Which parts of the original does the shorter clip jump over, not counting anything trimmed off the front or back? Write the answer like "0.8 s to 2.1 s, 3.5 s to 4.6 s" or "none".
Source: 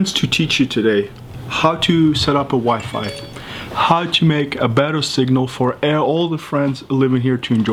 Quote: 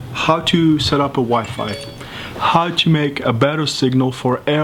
none